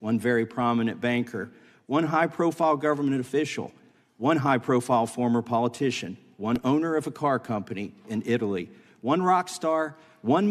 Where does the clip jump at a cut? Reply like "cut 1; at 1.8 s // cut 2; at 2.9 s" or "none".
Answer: none